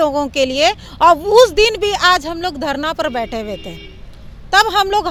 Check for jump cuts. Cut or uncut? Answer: uncut